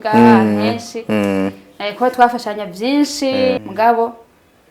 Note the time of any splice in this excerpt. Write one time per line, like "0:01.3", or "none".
0:03.6